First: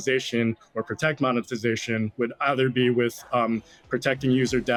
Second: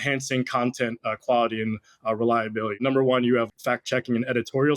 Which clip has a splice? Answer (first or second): second